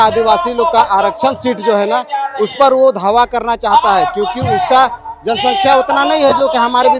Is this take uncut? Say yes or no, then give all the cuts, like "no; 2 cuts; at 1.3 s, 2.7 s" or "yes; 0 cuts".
yes; 0 cuts